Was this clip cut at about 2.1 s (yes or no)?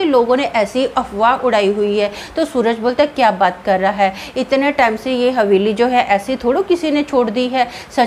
no